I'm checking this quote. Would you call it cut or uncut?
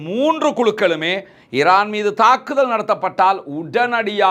uncut